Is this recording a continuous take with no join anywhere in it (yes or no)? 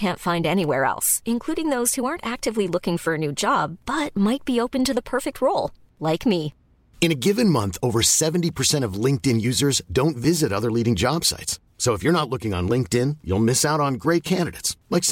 yes